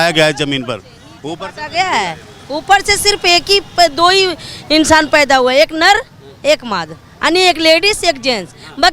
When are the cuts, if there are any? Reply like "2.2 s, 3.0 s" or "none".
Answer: none